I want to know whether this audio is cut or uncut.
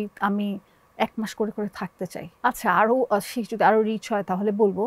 cut